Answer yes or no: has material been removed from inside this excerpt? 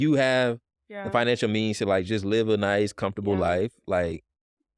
no